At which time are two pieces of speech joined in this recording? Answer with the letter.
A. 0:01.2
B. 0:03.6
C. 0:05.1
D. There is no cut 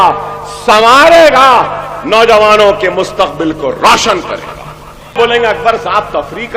C